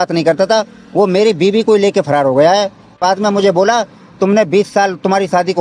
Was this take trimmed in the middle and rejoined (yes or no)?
yes